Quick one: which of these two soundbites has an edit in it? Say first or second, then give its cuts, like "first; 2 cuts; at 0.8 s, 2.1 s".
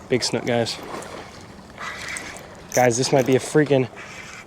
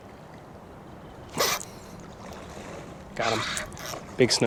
first; 1 cut; at 2.3 s